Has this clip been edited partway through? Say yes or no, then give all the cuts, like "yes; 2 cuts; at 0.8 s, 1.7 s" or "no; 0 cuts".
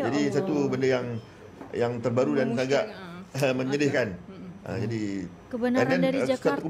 no; 0 cuts